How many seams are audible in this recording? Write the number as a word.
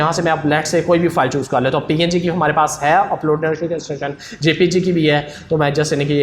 zero